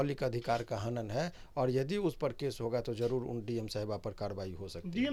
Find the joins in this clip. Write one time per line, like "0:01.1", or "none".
none